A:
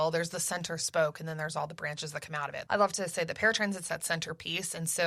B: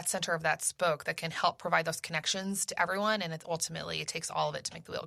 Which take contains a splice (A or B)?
A